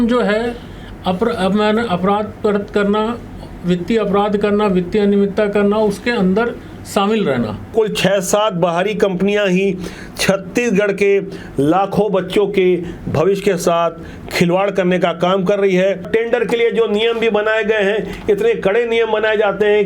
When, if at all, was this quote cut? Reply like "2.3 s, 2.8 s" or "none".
7.7 s, 16.1 s